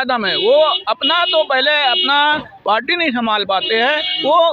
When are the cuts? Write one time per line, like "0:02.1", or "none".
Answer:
none